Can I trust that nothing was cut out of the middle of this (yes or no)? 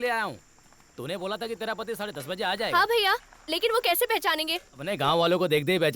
no